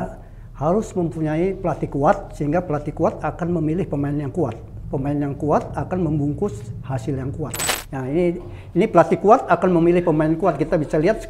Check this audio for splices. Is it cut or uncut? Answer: cut